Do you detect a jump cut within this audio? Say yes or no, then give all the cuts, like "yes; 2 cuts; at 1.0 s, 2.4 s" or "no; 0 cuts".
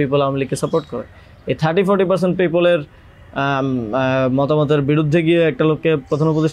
no; 0 cuts